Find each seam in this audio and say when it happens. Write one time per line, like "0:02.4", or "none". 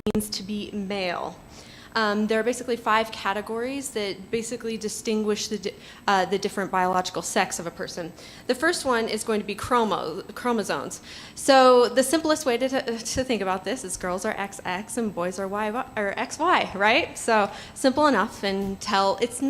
0:01.0